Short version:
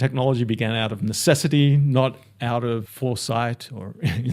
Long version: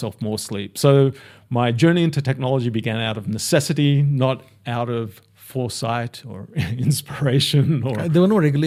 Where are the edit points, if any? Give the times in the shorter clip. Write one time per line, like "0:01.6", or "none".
0:02.9